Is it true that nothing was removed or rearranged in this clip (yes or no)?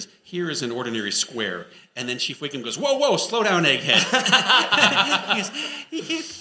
yes